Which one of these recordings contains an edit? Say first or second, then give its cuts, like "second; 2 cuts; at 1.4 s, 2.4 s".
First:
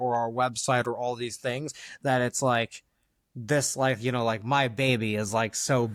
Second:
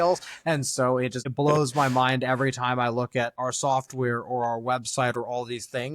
second; 1 cut; at 3.4 s